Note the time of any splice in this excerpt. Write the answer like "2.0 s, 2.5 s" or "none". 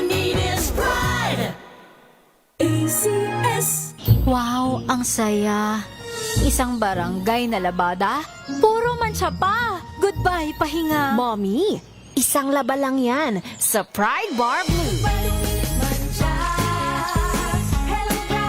3.9 s